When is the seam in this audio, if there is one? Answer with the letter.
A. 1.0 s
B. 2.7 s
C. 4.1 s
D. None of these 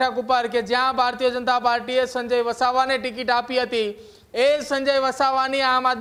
D